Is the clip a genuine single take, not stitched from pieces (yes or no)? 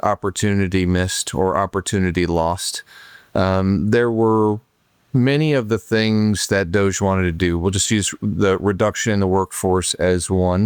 yes